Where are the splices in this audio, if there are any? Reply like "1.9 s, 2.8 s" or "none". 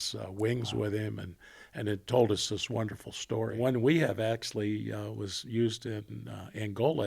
3.5 s